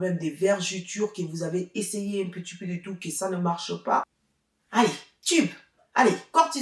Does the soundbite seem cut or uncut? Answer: cut